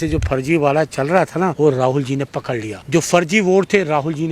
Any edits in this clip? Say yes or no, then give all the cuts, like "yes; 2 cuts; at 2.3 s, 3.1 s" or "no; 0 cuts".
yes; 2 cuts; at 1.5 s, 2.7 s